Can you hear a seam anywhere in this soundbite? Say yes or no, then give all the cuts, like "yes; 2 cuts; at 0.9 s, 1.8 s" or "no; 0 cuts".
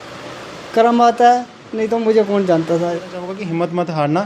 yes; 1 cut; at 3.3 s